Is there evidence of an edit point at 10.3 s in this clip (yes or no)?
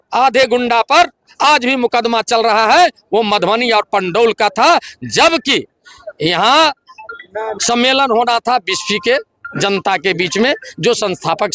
no